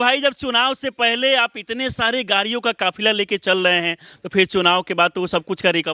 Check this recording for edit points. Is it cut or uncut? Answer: uncut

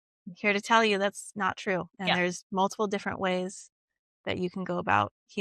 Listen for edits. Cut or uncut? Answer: cut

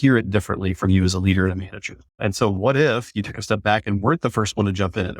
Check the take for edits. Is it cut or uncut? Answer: cut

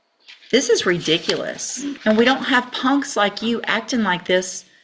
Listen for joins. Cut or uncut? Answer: cut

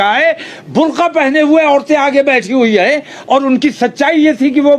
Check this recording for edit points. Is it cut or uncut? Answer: uncut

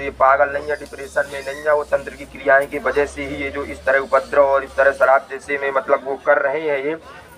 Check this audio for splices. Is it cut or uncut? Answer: uncut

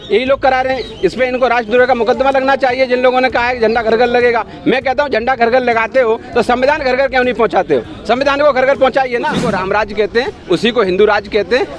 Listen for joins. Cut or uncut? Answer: cut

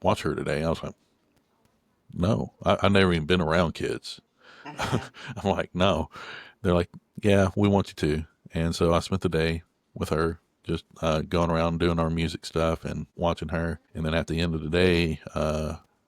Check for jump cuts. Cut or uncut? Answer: cut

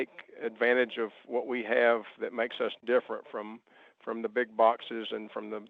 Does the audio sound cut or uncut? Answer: uncut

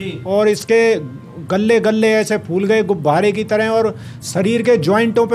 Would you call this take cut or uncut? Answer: uncut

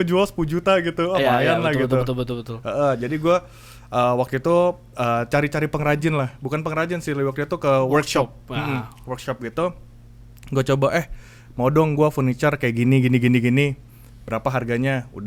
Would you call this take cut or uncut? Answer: uncut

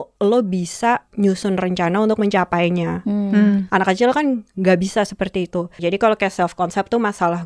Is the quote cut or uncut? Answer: cut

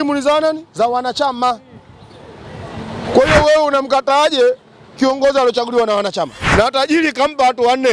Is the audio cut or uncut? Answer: cut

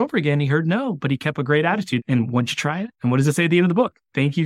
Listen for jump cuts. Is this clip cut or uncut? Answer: cut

